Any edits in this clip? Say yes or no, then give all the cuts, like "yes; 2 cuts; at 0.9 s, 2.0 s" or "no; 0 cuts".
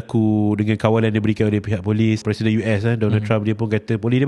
yes; 1 cut; at 2.2 s